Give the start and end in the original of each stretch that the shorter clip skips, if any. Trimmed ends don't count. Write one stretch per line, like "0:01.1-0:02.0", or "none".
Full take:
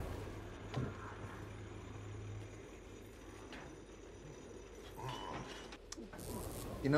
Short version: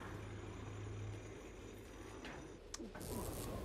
0:03.9-0:05.8